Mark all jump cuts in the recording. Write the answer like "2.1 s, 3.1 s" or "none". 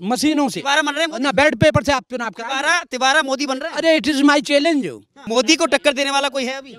5.2 s